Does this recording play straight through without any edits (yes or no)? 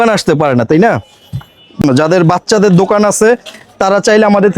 no